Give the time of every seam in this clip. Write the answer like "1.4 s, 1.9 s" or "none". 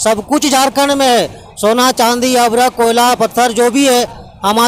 1.4 s